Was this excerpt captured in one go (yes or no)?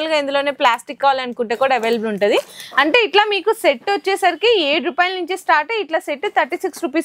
yes